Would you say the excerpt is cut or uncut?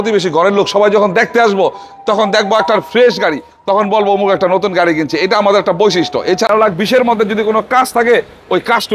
cut